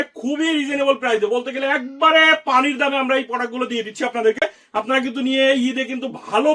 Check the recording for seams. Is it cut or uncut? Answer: uncut